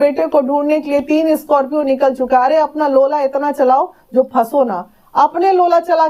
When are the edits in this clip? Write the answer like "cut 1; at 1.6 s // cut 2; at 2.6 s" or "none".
none